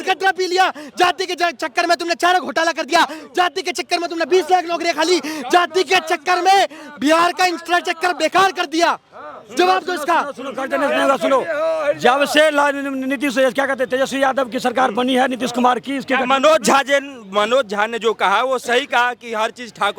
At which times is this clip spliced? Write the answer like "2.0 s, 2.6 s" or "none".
none